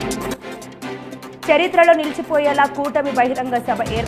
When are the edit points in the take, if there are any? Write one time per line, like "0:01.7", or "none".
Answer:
0:01.3